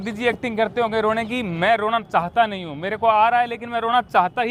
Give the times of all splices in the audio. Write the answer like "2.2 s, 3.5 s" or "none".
none